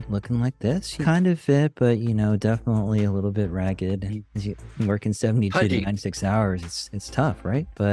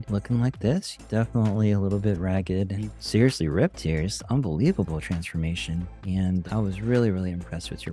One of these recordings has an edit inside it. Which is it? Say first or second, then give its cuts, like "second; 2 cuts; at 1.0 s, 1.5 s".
second; 2 cuts; at 1.0 s, 3.0 s